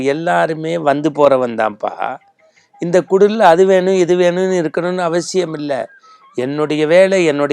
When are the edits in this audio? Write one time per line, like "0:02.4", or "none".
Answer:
none